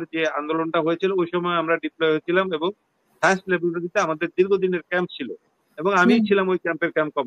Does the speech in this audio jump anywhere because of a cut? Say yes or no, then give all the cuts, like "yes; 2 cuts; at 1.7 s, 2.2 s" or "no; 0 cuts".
no; 0 cuts